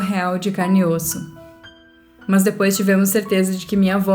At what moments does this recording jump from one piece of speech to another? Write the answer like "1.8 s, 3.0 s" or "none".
1.7 s

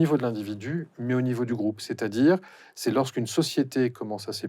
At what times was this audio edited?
1.5 s

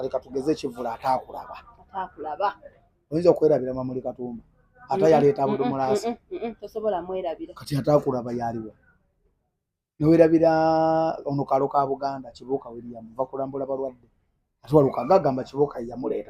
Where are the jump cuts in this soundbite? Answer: none

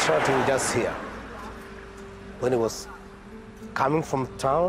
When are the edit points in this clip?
none

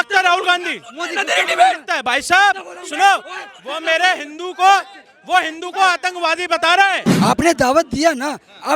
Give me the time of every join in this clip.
7.1 s

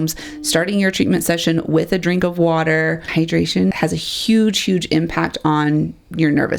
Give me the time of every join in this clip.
3.5 s

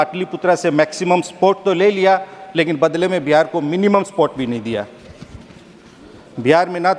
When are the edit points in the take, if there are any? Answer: none

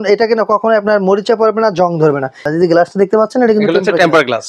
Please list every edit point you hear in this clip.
2.4 s

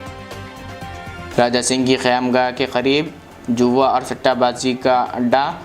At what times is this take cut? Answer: 1.3 s

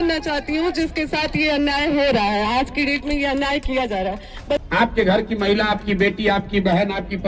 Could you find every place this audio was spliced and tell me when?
4.6 s

